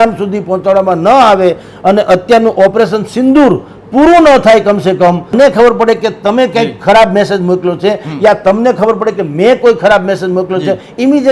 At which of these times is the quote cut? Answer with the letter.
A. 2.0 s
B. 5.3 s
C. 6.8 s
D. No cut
B